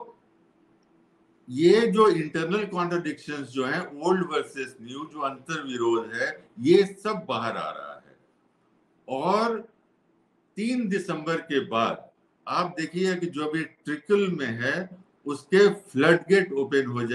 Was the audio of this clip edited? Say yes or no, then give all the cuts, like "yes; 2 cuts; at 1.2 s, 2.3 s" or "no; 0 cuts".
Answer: no; 0 cuts